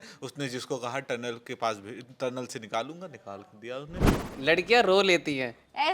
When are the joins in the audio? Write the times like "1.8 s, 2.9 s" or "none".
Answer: 4.3 s